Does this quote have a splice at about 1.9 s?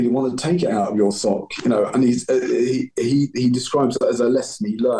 no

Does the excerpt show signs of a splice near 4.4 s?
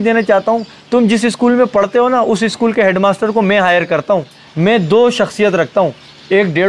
yes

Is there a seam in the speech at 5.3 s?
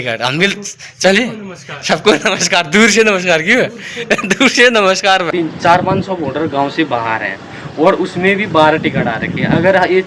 yes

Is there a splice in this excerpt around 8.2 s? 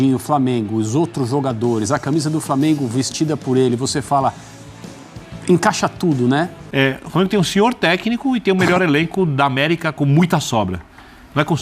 no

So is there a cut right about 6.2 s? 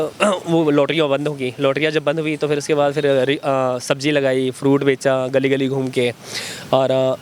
no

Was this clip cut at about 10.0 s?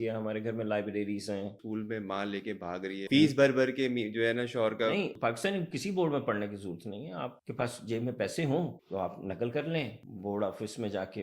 yes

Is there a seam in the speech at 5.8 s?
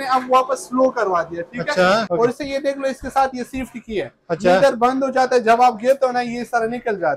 no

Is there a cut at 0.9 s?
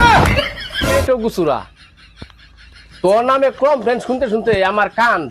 yes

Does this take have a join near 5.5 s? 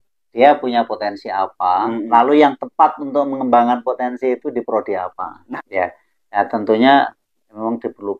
yes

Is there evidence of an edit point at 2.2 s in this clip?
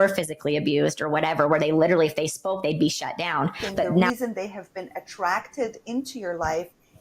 no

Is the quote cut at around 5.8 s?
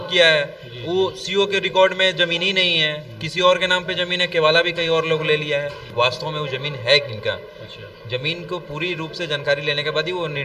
yes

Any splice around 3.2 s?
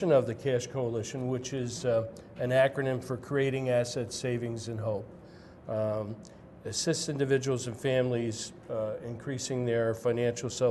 no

